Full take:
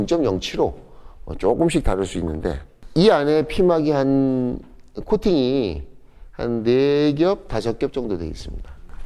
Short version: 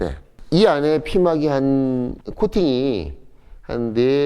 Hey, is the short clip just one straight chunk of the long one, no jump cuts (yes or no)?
no